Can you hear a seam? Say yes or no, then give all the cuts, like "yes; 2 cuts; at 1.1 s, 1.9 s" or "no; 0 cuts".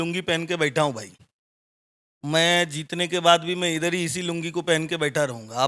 no; 0 cuts